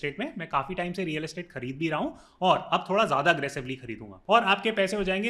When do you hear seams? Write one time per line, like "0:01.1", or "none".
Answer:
0:04.2